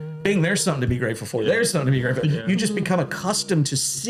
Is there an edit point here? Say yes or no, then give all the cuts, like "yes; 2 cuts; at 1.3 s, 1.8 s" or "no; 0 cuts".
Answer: no; 0 cuts